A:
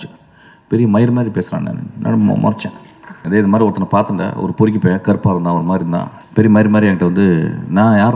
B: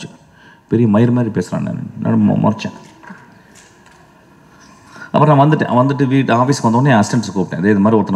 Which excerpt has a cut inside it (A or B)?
A